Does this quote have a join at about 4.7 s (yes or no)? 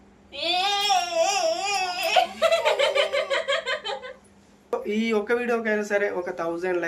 yes